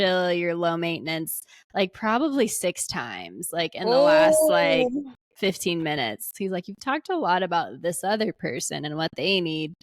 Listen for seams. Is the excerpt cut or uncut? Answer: cut